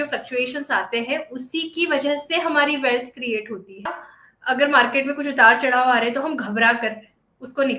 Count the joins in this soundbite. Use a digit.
1